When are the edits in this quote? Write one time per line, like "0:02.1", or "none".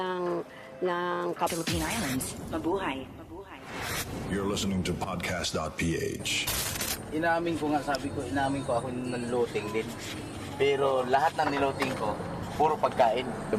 none